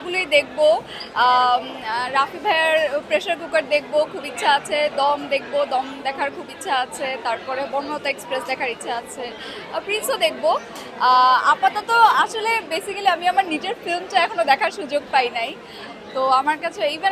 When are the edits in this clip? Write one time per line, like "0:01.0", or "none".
none

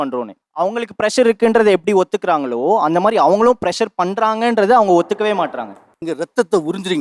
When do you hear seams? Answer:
0:06.0

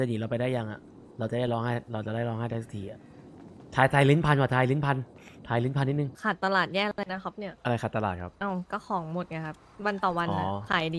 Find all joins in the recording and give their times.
0:06.1
0:07.5
0:08.3
0:09.6

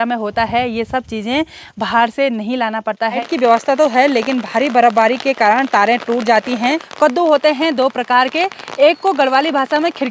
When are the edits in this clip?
0:03.2
0:06.9

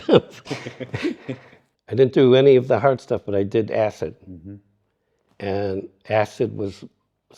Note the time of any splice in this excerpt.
0:01.6

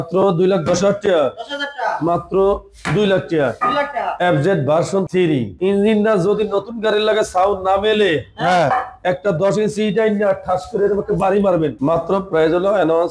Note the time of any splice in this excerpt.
0:04.2
0:05.5
0:11.7

